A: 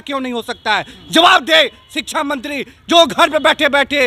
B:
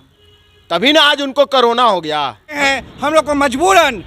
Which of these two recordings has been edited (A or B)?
B